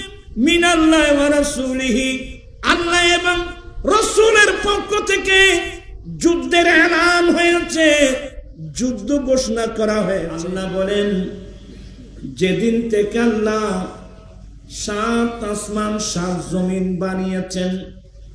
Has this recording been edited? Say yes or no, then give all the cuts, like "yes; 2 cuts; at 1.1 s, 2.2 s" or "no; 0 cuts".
yes; 1 cut; at 10.4 s